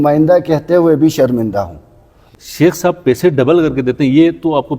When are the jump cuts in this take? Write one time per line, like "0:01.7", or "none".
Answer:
0:02.3